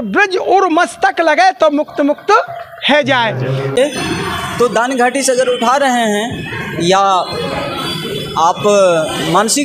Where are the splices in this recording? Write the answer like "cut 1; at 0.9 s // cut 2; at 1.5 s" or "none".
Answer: cut 1; at 3.7 s